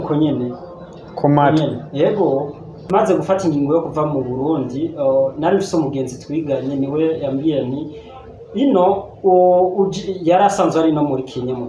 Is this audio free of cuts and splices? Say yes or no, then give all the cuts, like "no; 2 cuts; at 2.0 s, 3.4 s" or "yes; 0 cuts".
no; 1 cut; at 2.9 s